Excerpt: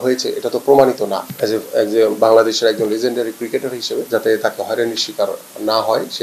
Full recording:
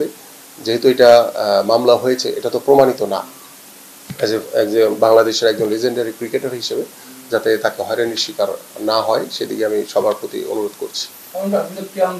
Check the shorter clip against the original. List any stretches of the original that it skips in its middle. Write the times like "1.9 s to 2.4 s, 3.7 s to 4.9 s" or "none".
3.3 s to 4.1 s, 6.9 s to 7.3 s